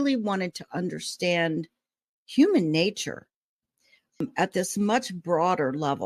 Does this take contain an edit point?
yes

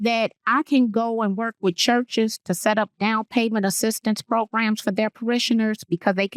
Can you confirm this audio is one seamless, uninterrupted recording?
yes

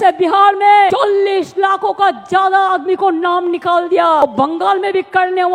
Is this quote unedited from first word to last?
no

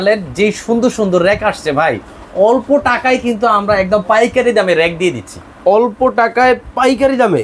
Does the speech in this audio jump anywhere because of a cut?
no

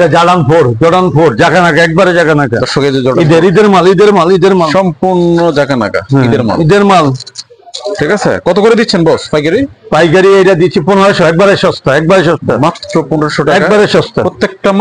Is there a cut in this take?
no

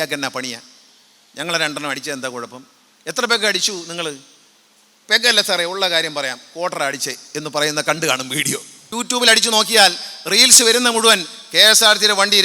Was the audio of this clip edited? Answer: yes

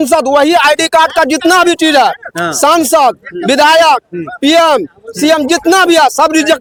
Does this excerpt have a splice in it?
no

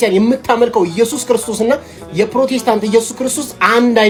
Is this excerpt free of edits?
yes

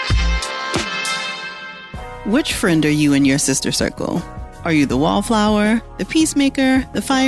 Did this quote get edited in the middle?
yes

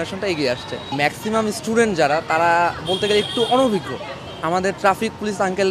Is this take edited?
no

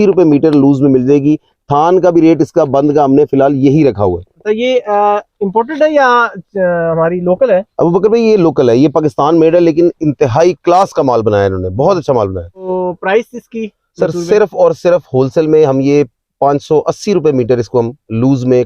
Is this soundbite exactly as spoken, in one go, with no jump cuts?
no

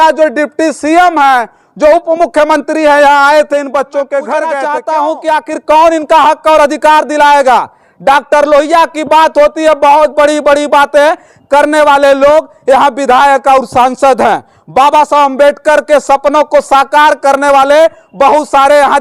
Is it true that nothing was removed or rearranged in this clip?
no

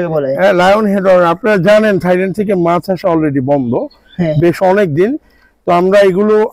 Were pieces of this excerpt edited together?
no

